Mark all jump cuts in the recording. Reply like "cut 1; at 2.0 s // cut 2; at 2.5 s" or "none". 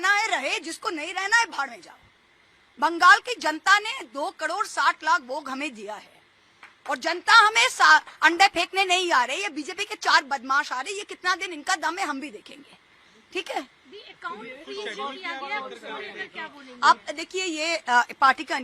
none